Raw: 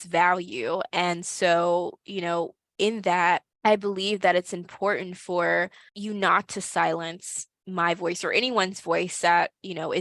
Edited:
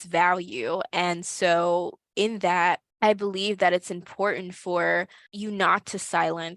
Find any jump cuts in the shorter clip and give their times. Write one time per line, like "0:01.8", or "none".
0:02.0